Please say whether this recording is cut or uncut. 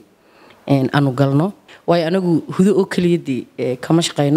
cut